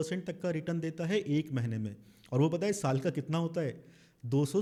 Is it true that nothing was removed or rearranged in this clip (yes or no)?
yes